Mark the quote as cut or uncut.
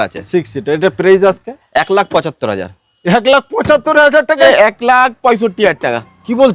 cut